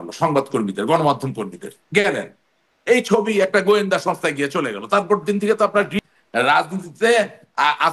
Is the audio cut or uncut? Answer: cut